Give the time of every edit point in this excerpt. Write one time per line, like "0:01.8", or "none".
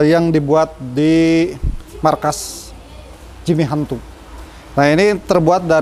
none